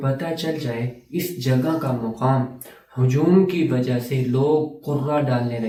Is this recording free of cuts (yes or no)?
yes